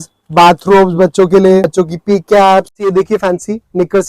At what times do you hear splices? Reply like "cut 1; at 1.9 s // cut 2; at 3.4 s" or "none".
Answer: cut 1; at 1.6 s // cut 2; at 2.8 s